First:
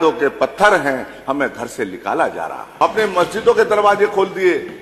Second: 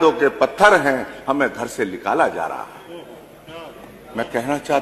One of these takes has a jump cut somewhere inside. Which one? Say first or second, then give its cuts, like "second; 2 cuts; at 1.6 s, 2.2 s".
first; 1 cut; at 2.6 s